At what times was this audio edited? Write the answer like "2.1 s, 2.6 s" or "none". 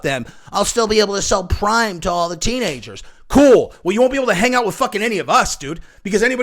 none